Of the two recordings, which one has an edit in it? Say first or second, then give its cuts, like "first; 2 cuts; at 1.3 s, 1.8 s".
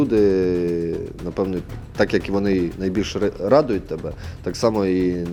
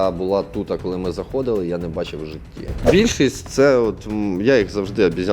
second; 1 cut; at 2.8 s